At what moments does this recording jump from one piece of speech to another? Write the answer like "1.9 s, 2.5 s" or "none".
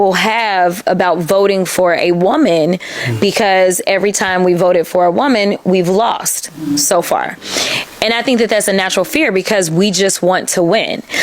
none